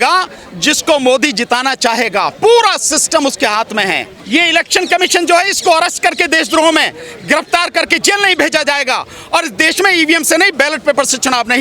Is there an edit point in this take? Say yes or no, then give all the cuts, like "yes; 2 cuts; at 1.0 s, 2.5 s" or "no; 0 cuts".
yes; 1 cut; at 4.1 s